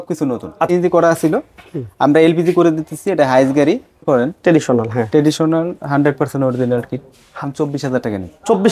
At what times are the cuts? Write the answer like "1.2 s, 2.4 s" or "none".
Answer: 0.7 s, 4.0 s, 7.4 s